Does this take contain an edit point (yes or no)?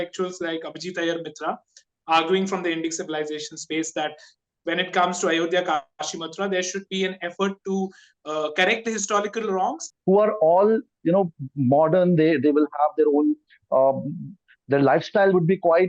yes